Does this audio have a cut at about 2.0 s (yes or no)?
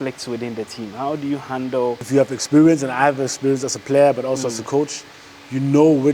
yes